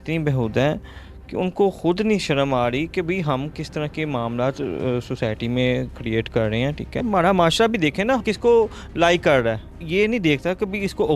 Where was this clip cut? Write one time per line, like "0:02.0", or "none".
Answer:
0:07.0
0:09.8